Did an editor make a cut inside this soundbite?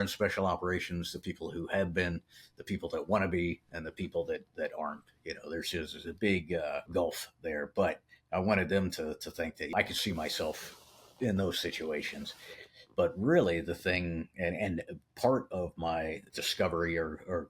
yes; 3 cuts; at 6.8 s, 9.7 s, 16.4 s

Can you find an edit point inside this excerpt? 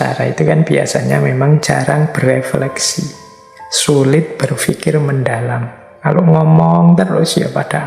no; 0 cuts

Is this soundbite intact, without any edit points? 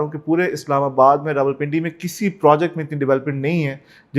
yes; 0 cuts

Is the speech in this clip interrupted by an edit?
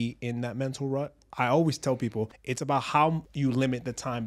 yes; 3 cuts; at 1.2 s, 2.4 s, 3.3 s

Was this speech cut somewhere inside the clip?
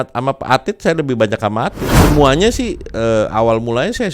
yes; 1 cut; at 1.9 s

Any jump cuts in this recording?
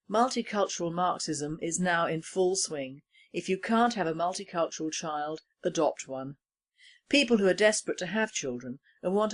no; 0 cuts

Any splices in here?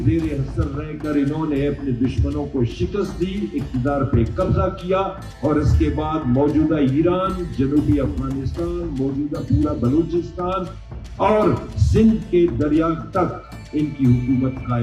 no; 0 cuts

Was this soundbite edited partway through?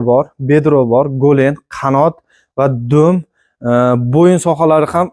no; 0 cuts

